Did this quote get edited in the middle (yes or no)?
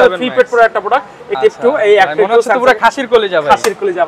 yes